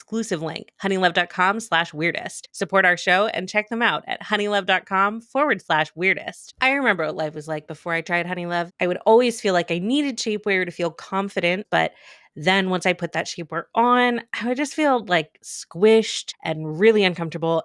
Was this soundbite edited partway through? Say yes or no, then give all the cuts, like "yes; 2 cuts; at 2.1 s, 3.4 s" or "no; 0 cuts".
yes; 3 cuts; at 8.7 s, 11.7 s, 16.4 s